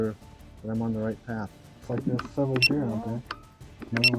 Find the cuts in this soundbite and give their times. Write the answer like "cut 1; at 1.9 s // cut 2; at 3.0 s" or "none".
cut 1; at 1.7 s